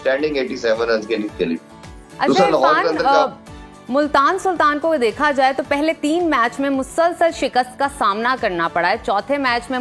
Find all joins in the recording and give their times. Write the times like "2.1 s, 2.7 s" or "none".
none